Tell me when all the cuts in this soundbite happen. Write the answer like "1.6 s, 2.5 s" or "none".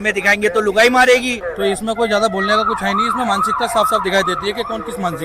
1.4 s